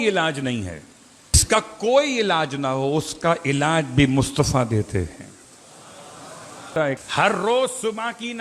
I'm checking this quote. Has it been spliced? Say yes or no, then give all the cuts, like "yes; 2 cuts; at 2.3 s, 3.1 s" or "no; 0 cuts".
yes; 2 cuts; at 1.4 s, 6.8 s